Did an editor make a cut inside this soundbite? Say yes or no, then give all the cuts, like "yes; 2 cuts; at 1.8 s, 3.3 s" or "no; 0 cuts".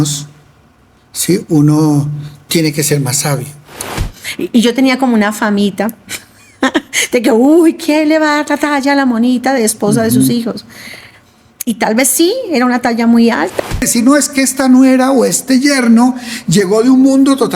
yes; 2 cuts; at 3.9 s, 13.8 s